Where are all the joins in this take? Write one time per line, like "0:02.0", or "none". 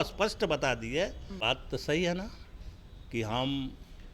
0:01.3